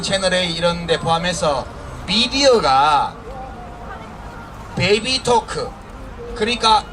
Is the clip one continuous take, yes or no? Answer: yes